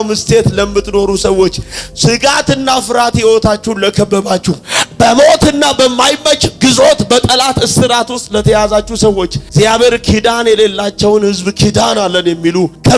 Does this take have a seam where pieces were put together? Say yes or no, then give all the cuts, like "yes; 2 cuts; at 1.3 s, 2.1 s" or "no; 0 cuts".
no; 0 cuts